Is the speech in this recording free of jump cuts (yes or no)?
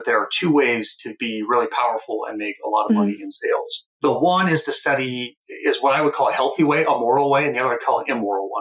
no